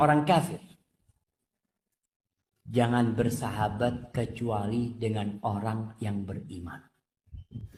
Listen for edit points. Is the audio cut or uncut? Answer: uncut